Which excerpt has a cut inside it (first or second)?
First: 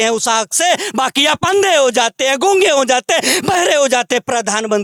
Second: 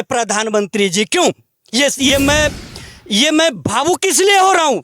second